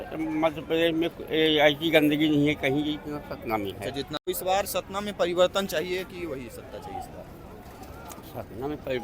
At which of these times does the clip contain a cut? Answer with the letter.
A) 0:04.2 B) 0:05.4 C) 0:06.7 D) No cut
A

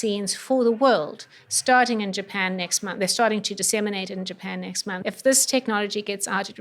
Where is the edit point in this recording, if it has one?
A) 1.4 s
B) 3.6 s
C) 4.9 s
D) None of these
C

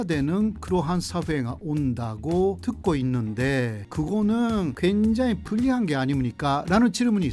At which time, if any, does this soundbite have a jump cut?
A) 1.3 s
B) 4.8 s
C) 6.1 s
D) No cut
B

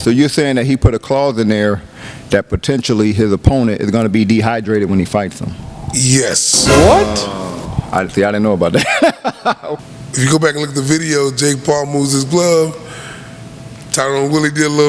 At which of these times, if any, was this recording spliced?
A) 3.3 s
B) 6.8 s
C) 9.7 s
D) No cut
C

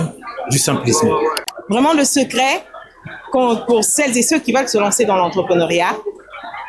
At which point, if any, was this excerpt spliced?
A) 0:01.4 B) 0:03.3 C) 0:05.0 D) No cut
A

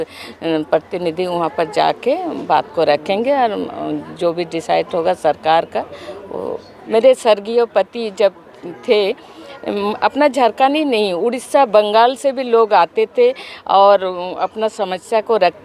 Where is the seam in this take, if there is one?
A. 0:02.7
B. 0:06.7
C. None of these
B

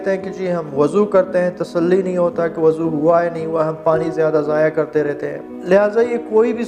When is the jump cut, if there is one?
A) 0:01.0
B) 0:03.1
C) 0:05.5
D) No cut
C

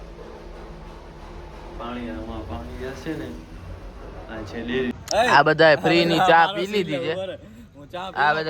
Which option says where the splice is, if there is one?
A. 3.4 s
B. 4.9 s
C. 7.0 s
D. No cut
B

